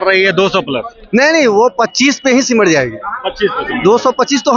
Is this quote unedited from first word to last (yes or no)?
yes